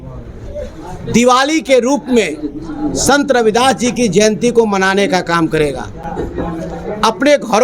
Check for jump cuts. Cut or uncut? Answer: uncut